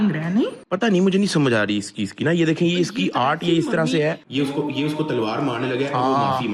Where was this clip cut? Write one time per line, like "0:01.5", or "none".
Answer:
none

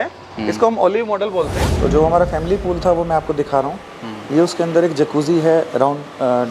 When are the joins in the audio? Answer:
0:01.7

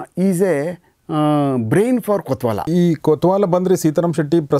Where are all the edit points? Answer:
0:02.7

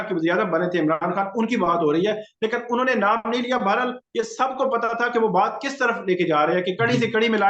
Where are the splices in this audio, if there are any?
none

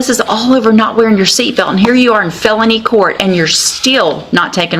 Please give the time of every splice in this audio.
none

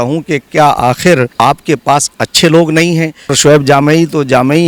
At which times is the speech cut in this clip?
0:01.3
0:03.4

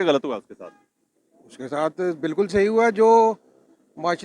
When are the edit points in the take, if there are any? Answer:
none

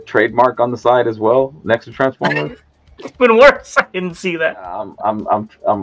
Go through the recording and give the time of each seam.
0:04.9

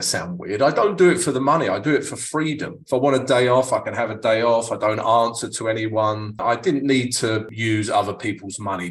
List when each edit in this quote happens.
0:02.8
0:06.3
0:07.5

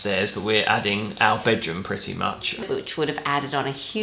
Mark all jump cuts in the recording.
0:02.6

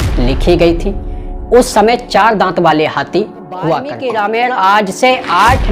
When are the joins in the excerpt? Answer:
0:03.9

